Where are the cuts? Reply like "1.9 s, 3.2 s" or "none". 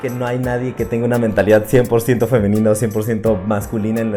none